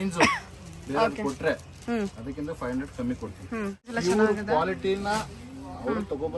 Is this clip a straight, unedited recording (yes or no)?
no